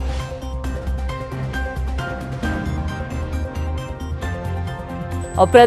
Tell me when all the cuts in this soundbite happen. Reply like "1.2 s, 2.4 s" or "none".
1.5 s